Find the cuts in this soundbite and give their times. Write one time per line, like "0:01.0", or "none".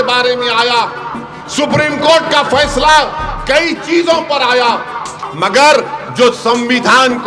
0:05.2